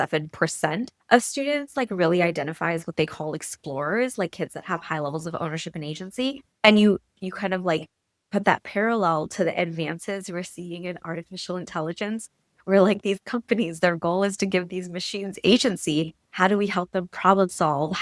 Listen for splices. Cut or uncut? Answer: cut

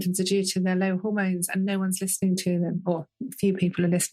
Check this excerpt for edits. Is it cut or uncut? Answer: uncut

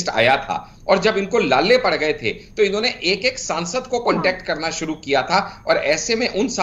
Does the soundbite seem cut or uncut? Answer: uncut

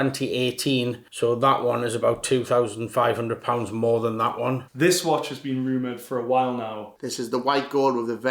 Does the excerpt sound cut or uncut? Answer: cut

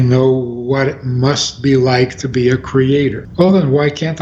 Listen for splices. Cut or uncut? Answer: cut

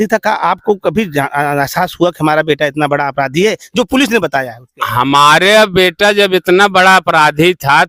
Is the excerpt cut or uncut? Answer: uncut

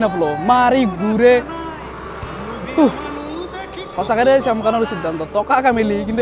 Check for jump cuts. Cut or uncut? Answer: uncut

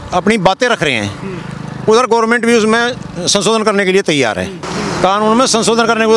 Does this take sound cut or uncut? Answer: cut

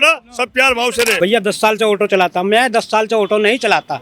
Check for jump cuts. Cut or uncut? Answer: cut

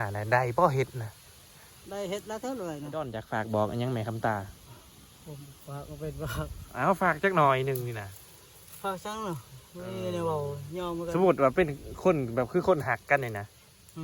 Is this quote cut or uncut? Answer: cut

